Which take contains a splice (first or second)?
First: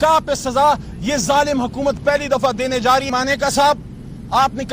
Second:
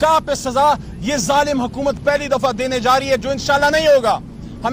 first